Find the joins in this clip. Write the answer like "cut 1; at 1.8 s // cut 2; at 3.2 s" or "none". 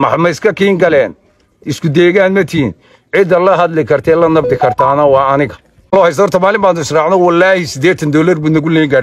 cut 1; at 5.9 s

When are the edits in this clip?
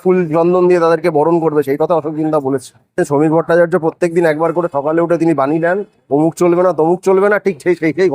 cut 1; at 3.0 s

